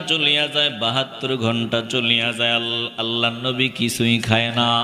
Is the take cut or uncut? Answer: uncut